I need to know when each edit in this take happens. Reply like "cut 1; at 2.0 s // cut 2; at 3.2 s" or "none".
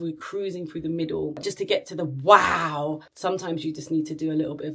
cut 1; at 1.4 s // cut 2; at 3.1 s